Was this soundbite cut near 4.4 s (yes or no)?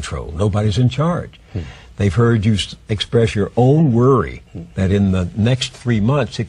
yes